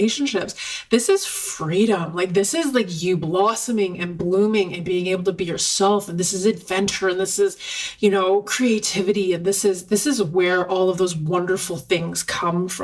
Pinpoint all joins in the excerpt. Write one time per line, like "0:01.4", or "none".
none